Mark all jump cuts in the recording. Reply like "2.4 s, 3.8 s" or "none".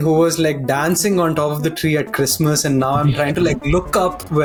none